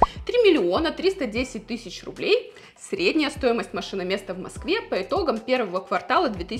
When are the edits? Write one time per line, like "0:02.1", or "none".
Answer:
none